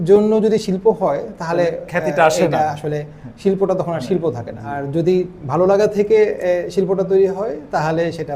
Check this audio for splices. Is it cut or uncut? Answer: cut